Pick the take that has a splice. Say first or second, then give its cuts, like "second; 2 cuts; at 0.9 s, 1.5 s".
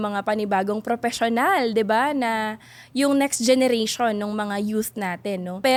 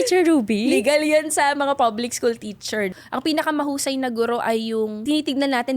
second; 2 cuts; at 2.9 s, 5.0 s